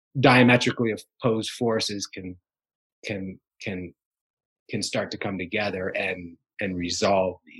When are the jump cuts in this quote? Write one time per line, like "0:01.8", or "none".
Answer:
none